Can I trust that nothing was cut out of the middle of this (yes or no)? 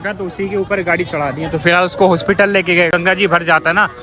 no